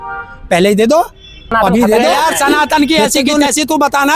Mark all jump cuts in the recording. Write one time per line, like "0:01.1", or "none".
0:02.2